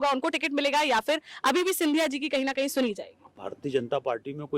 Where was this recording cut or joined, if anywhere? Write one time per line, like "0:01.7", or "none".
0:03.5